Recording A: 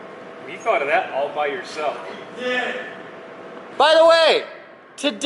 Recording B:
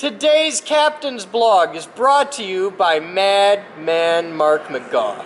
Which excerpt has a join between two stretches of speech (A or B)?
A